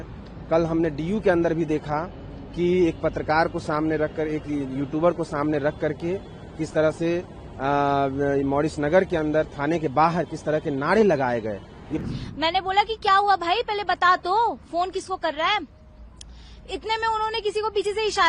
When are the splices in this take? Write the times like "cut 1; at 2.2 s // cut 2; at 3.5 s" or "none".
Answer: cut 1; at 12.0 s